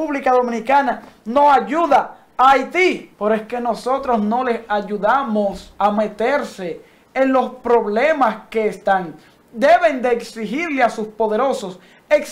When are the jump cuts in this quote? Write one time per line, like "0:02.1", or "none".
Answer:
0:03.1
0:05.6

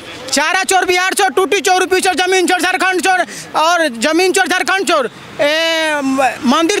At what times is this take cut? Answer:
none

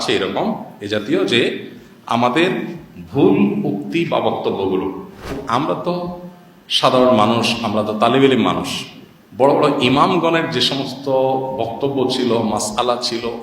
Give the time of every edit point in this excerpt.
0:05.4

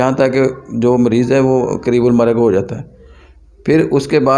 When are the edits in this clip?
none

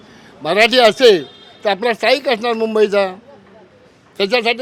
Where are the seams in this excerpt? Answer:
none

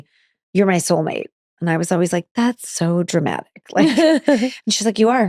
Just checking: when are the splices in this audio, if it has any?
none

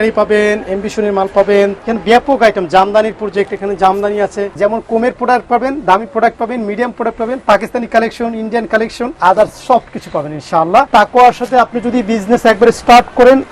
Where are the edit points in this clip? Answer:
0:01.7
0:04.4
0:09.1
0:10.9

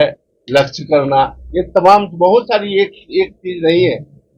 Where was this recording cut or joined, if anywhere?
none

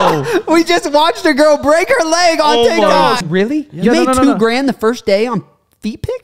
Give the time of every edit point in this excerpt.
0:03.2

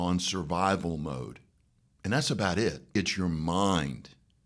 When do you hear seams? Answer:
0:03.0

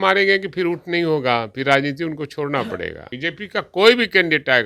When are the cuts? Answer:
0:03.0

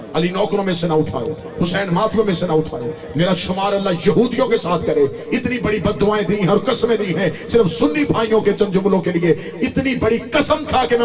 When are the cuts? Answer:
none

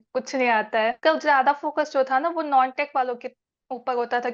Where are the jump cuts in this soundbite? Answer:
0:01.0

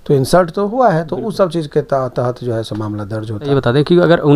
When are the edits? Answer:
0:03.4

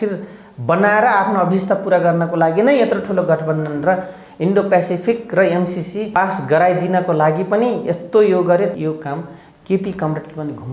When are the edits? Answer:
0:06.1
0:08.8

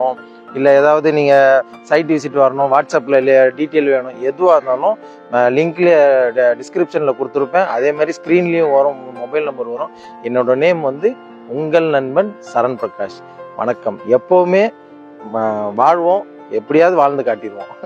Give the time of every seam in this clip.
none

